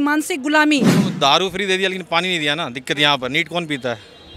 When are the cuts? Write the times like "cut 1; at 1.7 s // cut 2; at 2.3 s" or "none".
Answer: cut 1; at 1.1 s

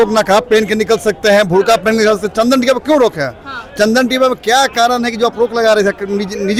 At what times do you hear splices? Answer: none

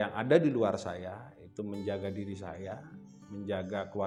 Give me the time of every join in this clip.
none

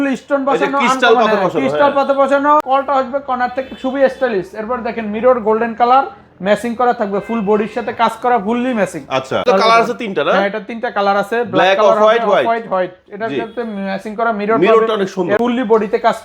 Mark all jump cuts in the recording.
cut 1; at 2.6 s // cut 2; at 9.5 s // cut 3; at 15.4 s

